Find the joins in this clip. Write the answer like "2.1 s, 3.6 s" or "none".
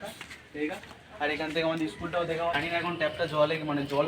2.6 s